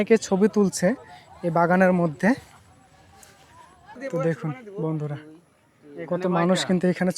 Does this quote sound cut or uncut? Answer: cut